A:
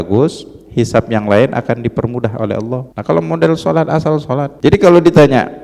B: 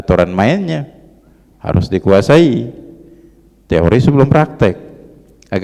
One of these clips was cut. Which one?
A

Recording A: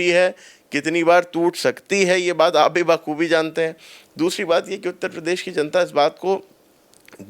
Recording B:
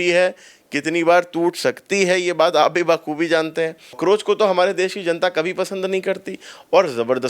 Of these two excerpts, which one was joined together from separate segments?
B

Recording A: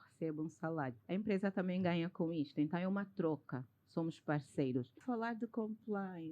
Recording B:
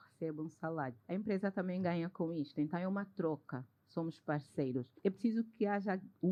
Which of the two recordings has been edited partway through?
A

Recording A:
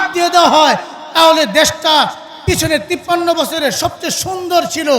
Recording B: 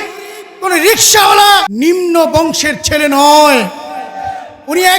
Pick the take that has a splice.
B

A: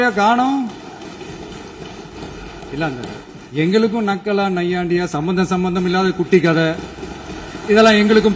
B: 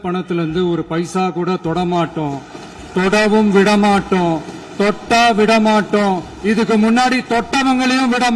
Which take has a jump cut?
A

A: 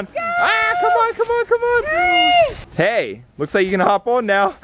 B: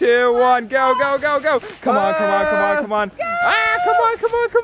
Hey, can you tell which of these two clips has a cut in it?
A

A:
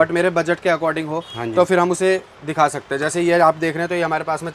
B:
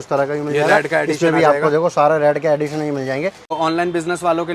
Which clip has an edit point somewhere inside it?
B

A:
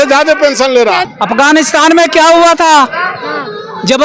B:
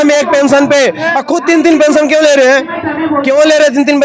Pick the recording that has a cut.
A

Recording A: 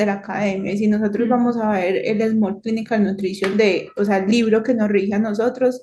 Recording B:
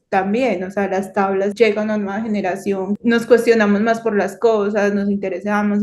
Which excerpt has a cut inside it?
B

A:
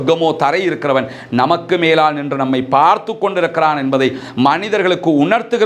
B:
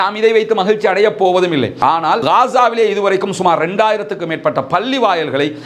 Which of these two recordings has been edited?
B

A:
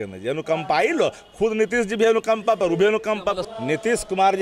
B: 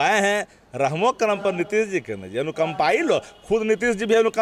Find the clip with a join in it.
A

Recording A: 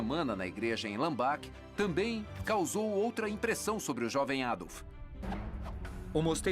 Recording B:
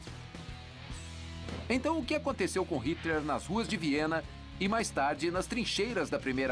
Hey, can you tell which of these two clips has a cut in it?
B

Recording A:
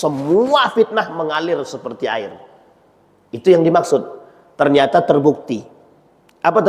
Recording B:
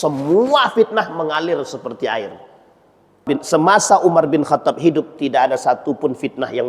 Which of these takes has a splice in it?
B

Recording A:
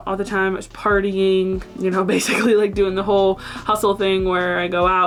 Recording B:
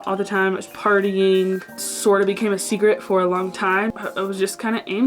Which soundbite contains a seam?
B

